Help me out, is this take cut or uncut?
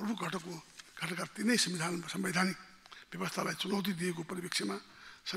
uncut